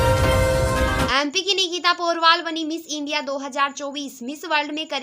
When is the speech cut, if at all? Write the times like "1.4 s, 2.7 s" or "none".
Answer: 1.1 s

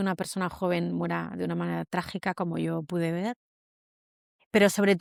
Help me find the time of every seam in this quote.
none

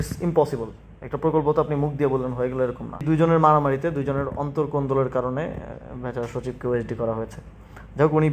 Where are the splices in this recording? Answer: 3.0 s

